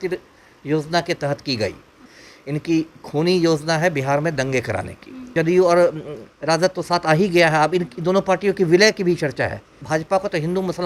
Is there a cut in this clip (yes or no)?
yes